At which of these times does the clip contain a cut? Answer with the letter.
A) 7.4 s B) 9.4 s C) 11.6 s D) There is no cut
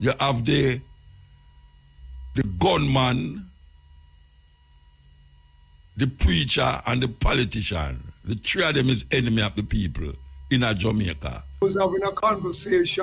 C